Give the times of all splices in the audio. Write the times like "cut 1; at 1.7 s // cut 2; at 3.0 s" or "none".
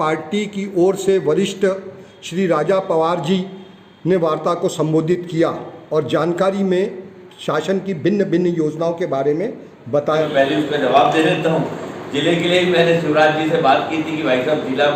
cut 1; at 10.2 s